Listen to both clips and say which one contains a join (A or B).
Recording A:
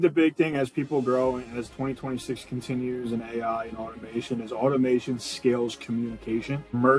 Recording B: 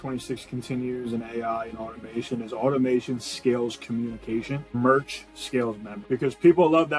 B